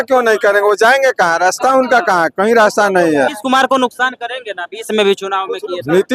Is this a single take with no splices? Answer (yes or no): no